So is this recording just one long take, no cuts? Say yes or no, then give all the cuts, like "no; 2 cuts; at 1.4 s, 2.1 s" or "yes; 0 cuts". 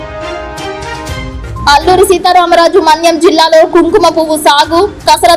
no; 1 cut; at 1.6 s